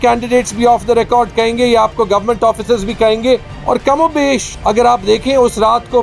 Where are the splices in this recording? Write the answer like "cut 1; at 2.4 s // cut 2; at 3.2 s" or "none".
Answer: cut 1; at 3.5 s // cut 2; at 4.5 s